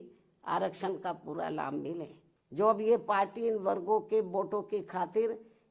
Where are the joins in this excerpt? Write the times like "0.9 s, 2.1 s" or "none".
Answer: 2.2 s